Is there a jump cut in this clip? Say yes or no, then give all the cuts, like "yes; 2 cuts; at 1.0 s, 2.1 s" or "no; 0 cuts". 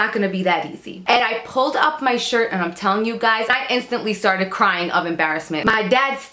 yes; 3 cuts; at 1.2 s, 3.5 s, 5.6 s